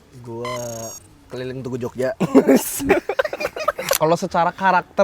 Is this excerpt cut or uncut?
cut